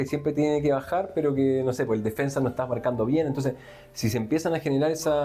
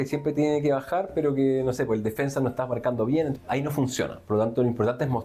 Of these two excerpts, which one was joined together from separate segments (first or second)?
second